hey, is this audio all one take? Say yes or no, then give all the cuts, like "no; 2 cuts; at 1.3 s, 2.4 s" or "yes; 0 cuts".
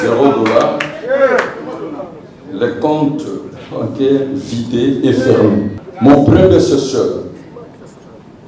no; 1 cut; at 5.8 s